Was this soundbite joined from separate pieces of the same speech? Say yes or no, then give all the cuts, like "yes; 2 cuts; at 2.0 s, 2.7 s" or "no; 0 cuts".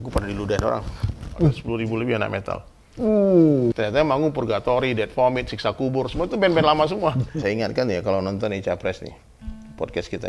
yes; 3 cuts; at 1.6 s, 3.8 s, 7.3 s